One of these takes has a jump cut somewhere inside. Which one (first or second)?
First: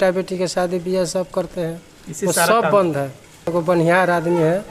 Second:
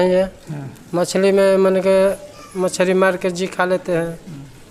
first